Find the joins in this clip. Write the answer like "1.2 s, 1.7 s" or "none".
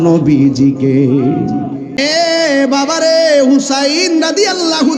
2.0 s